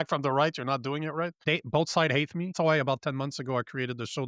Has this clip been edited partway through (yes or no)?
yes